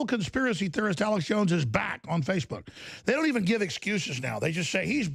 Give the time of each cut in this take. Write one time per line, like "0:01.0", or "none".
none